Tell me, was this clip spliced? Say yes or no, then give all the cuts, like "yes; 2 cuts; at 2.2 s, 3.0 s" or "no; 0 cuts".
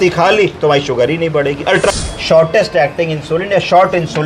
yes; 1 cut; at 1.9 s